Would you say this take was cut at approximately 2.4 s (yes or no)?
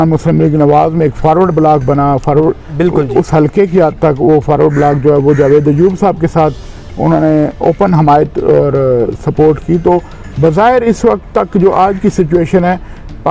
no